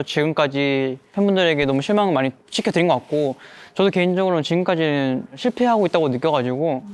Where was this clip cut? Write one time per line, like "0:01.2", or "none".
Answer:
0:01.0

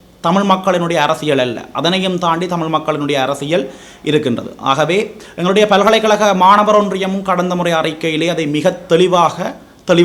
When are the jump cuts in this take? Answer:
none

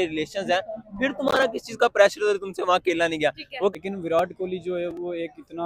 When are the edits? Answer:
0:03.7

